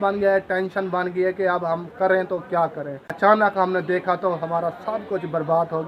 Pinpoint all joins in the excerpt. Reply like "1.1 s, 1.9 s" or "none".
3.3 s